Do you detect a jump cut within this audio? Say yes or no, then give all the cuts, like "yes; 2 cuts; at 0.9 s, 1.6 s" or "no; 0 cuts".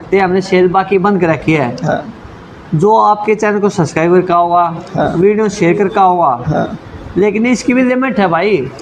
no; 0 cuts